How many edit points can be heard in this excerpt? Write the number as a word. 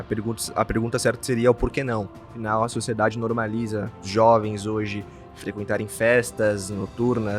one